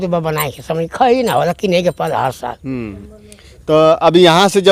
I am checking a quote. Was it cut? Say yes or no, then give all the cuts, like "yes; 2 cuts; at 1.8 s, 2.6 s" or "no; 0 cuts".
no; 0 cuts